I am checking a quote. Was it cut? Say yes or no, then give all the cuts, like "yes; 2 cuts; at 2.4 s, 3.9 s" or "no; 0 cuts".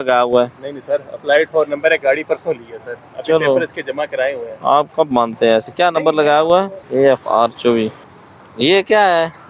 no; 0 cuts